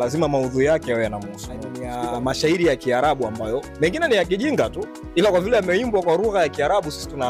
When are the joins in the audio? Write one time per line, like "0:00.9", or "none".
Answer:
0:01.8